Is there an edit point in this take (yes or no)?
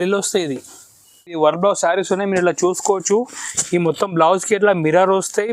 yes